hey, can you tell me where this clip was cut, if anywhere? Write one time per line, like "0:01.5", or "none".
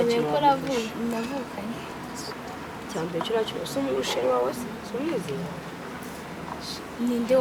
none